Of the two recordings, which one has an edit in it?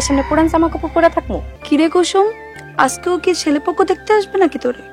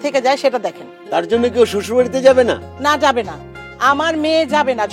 first; 1 cut; at 1.5 s

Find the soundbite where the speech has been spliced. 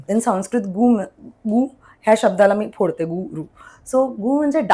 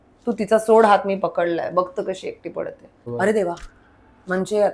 second; 1 cut; at 3.1 s

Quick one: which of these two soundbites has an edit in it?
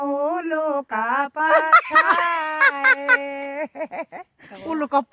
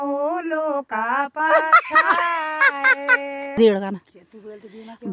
second; 1 cut; at 3.6 s

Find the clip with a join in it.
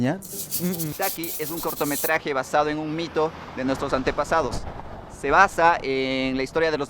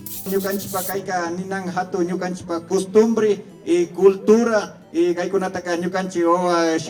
first; 1 cut; at 0.9 s

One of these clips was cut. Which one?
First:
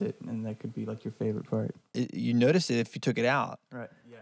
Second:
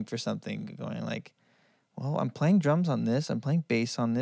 first; 1 cut; at 1.8 s

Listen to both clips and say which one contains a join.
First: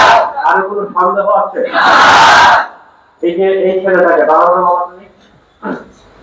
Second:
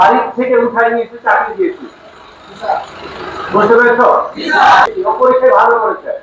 second; 1 cut; at 4.9 s

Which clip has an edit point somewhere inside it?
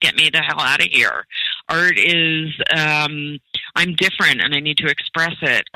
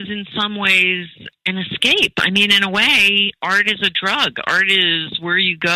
second; 1 cut; at 1.2 s

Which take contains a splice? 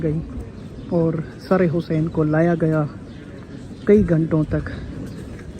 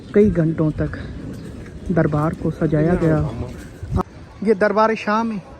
second; 1 cut; at 4.0 s

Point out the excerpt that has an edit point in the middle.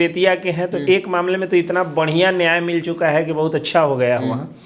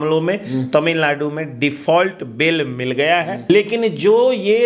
second; 1 cut; at 3.5 s

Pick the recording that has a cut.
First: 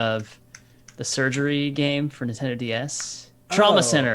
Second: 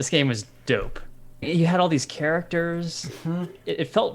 second; 1 cut; at 1.5 s

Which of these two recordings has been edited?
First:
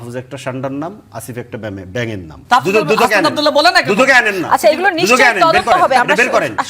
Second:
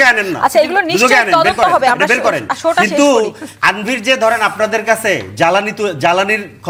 first; 1 cut; at 2.3 s

